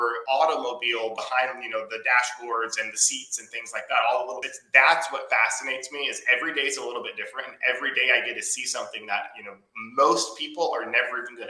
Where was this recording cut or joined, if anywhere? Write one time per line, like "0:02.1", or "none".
0:04.5